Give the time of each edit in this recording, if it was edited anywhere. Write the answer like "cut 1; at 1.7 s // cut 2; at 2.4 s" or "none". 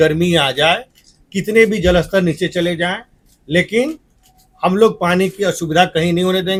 none